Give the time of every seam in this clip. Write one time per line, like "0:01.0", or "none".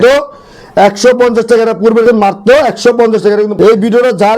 0:02.0
0:03.5

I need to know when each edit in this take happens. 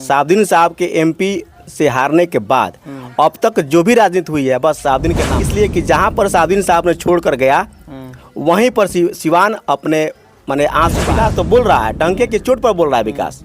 0:05.3
0:11.1

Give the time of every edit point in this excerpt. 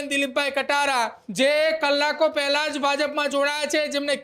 0:01.2

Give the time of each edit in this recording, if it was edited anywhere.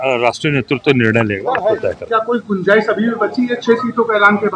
0:02.0

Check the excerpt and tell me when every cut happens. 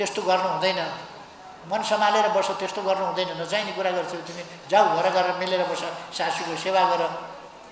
none

